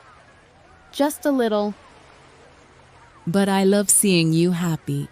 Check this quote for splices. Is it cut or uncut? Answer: cut